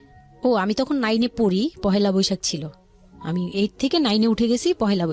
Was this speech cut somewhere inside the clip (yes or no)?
no